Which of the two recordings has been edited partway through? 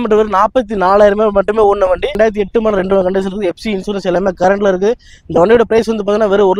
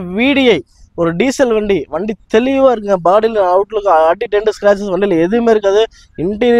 first; 1 cut; at 2.1 s

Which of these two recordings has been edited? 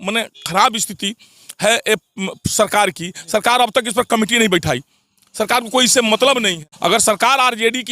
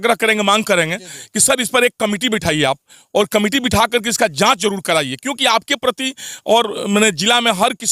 first; 1 cut; at 6.6 s

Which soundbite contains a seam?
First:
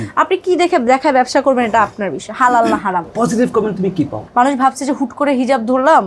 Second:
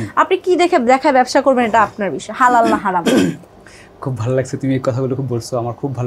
first; 2 cuts; at 3.0 s, 4.2 s

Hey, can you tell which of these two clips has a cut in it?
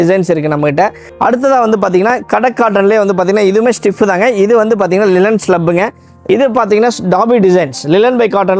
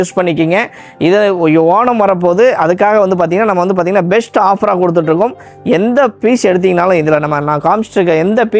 first; 2 cuts; at 1.0 s, 6.1 s

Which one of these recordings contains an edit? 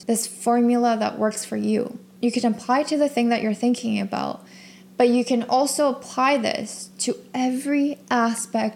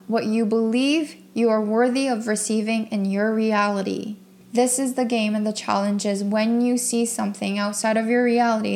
second; 1 cut; at 4.2 s

